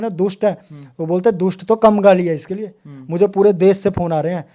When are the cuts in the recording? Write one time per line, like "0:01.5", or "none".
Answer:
none

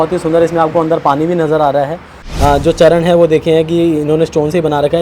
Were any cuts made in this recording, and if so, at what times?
0:02.3

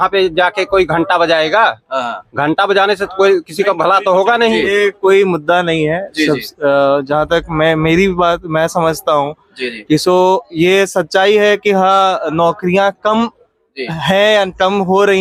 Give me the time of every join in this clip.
none

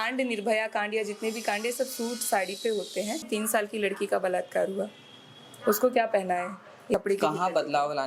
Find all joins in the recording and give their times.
0:03.2
0:06.9

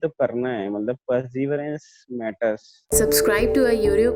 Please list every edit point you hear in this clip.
0:02.7

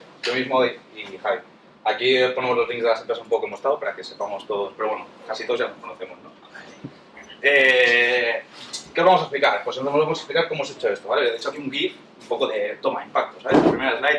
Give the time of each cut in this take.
0:12.1

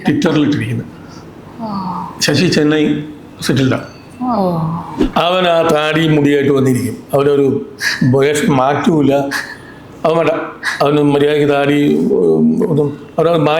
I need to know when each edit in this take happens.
0:05.0

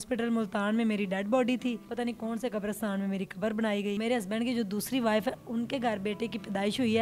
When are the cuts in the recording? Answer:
0:01.9
0:04.0

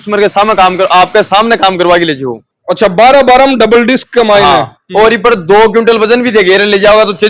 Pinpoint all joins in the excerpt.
0:02.4

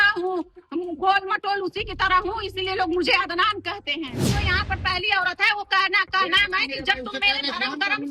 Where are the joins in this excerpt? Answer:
0:04.3

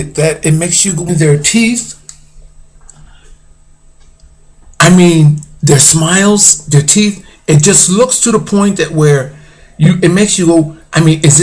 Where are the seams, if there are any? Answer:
none

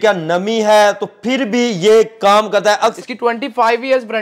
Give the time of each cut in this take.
0:02.9

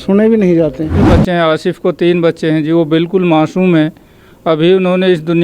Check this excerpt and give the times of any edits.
0:01.0

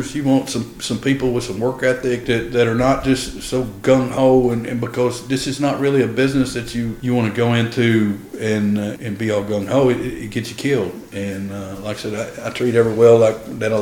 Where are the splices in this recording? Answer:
0:02.2
0:06.9
0:09.0

